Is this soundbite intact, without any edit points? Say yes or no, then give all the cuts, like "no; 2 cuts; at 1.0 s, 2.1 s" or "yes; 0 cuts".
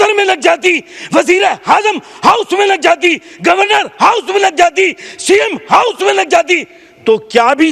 yes; 0 cuts